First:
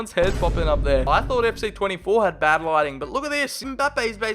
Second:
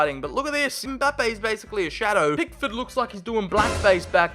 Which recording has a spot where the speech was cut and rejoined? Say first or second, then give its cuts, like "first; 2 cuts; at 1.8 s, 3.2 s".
first; 1 cut; at 1.1 s